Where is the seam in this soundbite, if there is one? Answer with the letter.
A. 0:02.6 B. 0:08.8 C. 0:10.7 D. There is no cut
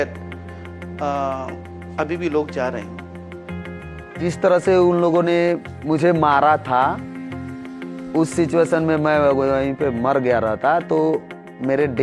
D